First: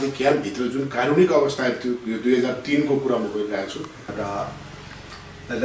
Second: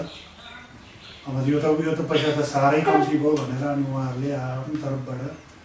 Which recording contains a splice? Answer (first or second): first